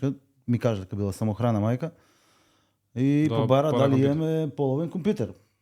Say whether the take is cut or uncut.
uncut